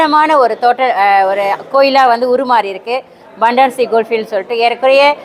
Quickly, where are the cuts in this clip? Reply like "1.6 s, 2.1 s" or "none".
none